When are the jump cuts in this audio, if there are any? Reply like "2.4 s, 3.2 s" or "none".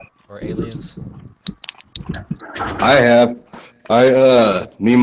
2.0 s